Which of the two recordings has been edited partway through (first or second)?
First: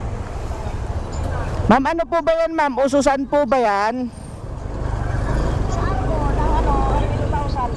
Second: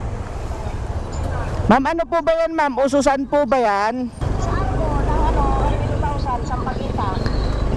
second